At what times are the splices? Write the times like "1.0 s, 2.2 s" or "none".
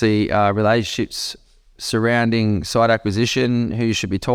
none

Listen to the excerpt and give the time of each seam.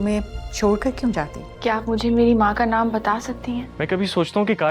1.4 s, 3.7 s

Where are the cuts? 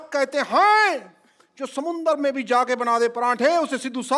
none

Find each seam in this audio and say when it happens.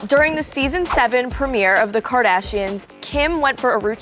none

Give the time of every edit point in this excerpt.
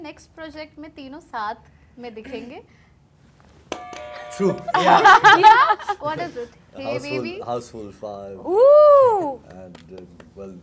none

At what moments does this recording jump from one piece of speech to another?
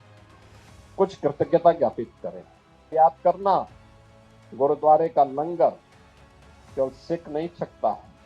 2.9 s

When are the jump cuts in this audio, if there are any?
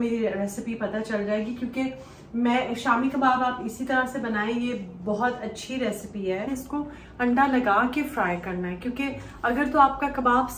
6.5 s

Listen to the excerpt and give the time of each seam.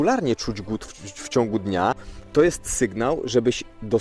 2.1 s

